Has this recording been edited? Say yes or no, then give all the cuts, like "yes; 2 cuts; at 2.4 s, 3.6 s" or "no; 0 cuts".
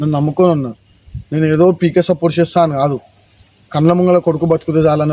no; 0 cuts